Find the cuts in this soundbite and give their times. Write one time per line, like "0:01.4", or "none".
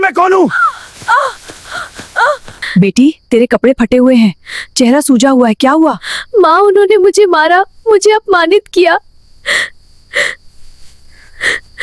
0:02.5